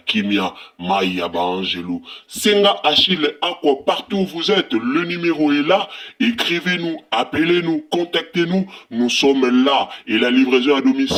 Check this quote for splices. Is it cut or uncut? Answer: uncut